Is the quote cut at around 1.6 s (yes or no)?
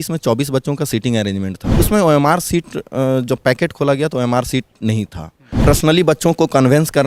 yes